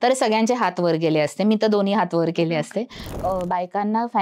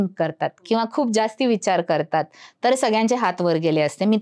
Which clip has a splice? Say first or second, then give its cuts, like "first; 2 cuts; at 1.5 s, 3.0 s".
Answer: first; 1 cut; at 3.2 s